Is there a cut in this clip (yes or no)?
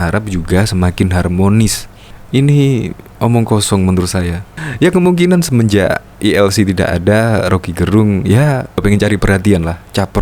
yes